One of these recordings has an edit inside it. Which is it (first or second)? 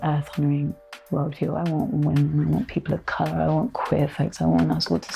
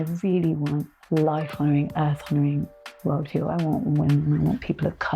second